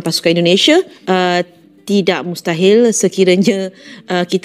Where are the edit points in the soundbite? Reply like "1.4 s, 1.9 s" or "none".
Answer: 1.0 s